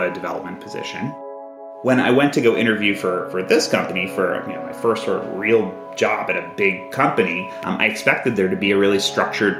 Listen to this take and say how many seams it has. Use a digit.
1